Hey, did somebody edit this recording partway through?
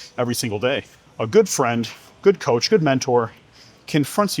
yes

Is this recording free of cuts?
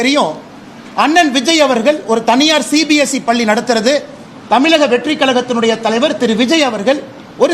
yes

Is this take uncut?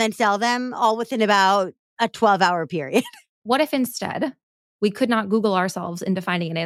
no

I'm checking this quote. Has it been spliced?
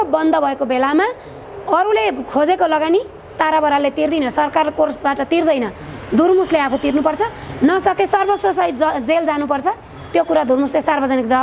no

